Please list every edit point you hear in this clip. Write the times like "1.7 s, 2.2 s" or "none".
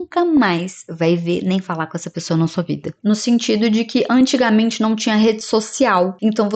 3.0 s